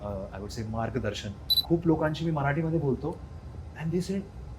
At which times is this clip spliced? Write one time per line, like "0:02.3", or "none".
0:01.5